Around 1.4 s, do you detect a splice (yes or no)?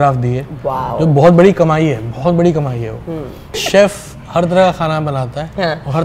no